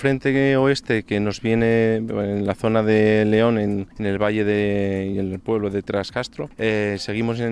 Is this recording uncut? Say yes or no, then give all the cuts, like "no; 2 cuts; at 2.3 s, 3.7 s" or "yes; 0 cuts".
no; 2 cuts; at 3.9 s, 6.4 s